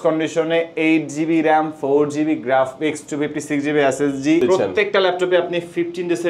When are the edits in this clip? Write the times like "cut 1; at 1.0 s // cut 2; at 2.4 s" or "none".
cut 1; at 4.4 s